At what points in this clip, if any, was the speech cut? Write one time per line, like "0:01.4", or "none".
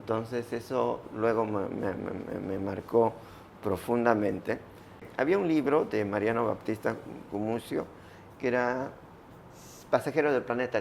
0:05.1